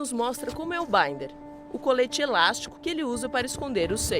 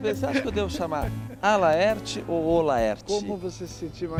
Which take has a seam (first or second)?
first